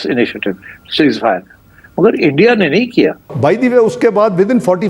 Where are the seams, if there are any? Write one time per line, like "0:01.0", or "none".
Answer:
0:03.3

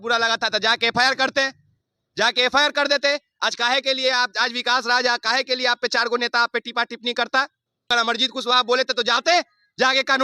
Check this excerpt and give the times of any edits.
0:07.9

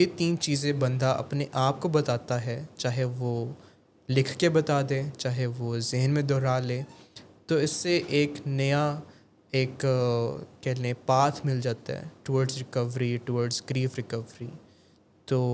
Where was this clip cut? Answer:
none

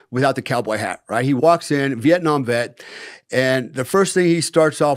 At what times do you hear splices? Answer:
none

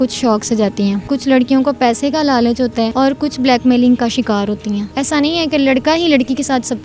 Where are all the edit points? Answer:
0:01.0
0:02.9
0:04.9

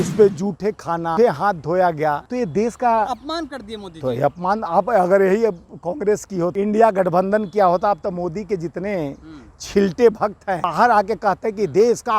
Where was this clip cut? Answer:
0:01.1
0:02.3
0:06.5
0:10.7

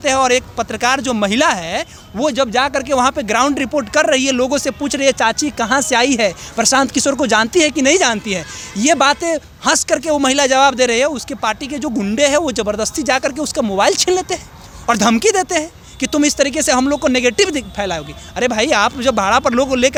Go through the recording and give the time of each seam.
none

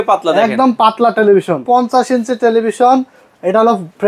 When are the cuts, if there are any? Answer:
0:01.6

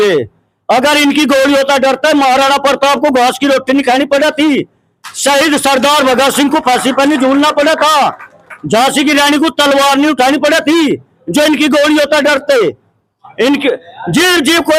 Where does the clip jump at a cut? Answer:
none

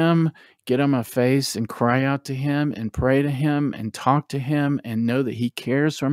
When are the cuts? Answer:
none

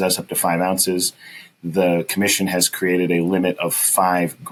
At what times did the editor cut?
none

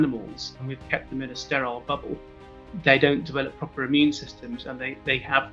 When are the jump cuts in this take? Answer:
none

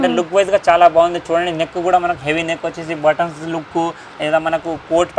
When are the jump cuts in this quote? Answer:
none

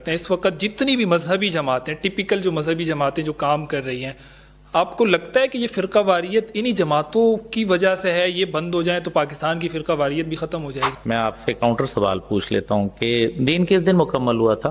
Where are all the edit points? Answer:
0:10.9

